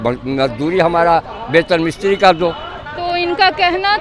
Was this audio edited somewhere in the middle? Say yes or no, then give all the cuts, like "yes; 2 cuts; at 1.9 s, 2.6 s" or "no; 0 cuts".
no; 0 cuts